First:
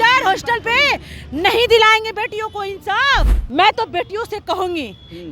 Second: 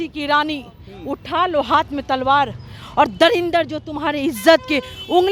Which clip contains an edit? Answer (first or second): first